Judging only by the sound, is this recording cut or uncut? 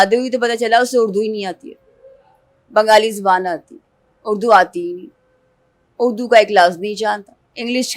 uncut